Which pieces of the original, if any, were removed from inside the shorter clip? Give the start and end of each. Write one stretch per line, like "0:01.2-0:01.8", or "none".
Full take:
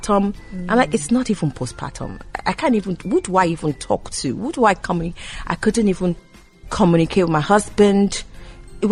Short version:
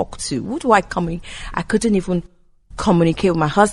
none